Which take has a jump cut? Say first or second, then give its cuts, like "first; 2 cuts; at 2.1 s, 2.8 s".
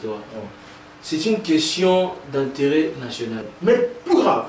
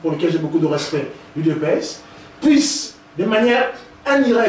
first; 1 cut; at 3.4 s